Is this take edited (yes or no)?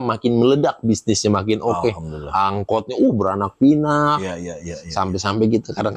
no